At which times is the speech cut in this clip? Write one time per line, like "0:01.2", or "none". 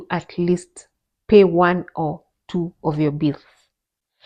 none